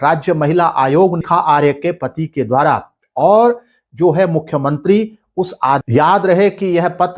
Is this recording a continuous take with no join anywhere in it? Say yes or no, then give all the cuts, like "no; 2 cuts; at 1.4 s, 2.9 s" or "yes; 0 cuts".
no; 2 cuts; at 1.2 s, 5.8 s